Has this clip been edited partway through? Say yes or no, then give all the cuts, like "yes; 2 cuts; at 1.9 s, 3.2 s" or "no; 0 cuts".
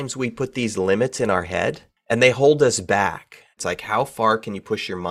yes; 2 cuts; at 2.0 s, 3.6 s